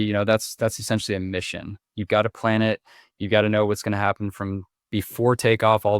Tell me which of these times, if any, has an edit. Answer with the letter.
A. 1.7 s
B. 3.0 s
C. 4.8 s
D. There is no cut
C